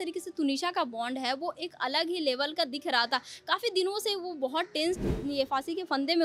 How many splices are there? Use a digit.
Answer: 1